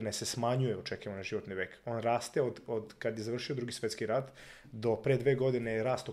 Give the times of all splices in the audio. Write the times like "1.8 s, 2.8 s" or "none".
none